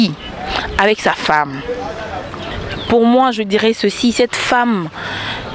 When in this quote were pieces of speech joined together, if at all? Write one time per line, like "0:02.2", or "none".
0:02.5